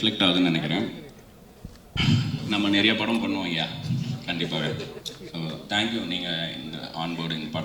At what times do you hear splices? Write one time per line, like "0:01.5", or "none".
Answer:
none